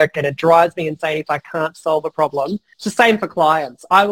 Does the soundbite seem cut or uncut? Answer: cut